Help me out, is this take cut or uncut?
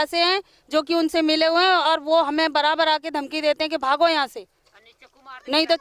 uncut